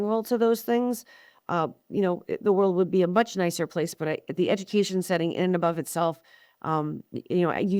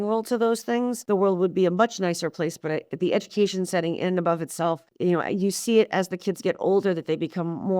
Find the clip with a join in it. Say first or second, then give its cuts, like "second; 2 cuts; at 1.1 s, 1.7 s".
second; 2 cuts; at 1.0 s, 4.9 s